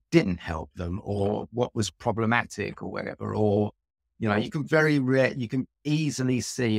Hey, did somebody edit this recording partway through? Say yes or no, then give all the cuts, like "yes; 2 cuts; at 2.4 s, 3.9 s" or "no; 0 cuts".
no; 0 cuts